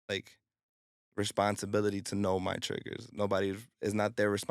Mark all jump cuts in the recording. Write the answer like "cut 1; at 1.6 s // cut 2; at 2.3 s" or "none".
none